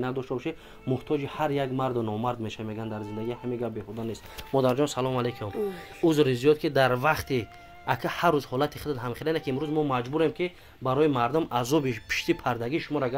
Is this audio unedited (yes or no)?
yes